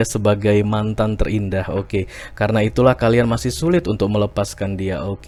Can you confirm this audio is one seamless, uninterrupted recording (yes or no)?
yes